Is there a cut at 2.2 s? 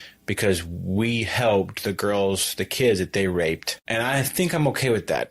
no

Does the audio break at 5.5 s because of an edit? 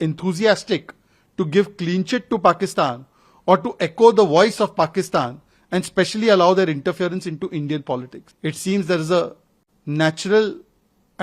no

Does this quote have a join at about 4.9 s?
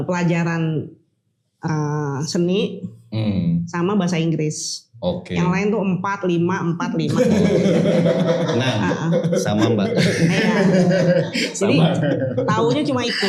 no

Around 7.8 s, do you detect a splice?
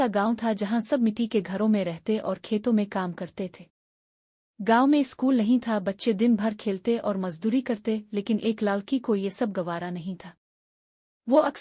no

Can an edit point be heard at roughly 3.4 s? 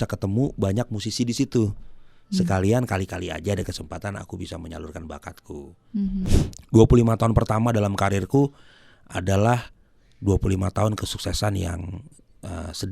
no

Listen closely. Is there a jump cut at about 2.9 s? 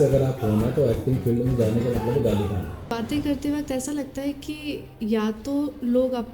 yes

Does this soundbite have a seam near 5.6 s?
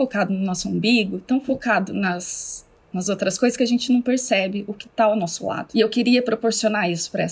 yes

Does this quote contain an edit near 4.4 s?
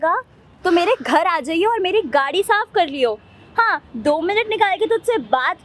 no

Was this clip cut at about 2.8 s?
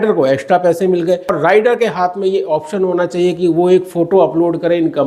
no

